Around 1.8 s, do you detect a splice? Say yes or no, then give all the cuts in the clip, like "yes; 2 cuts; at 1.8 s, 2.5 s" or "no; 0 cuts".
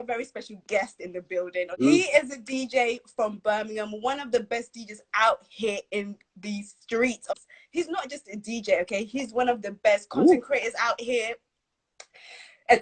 yes; 2 cuts; at 1.8 s, 7.2 s